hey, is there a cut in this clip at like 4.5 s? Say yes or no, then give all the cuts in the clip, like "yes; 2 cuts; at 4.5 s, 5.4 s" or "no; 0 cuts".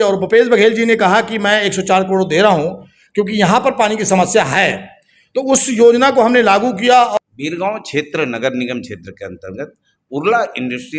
no; 1 cut; at 7.2 s